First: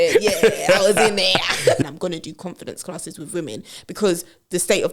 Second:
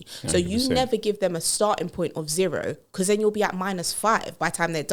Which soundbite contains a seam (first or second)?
first